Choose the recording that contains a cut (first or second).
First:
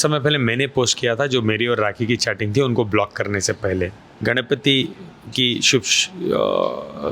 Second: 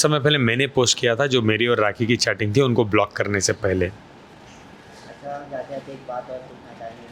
first